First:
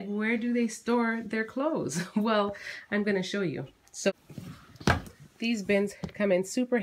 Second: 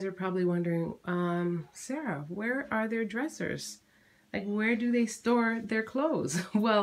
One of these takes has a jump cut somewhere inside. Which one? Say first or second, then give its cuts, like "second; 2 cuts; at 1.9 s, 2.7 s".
first; 1 cut; at 4.1 s